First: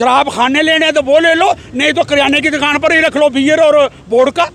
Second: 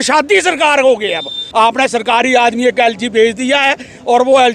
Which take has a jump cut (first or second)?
second